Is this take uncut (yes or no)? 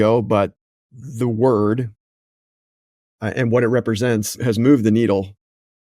no